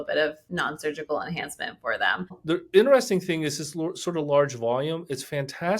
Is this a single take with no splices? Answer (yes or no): no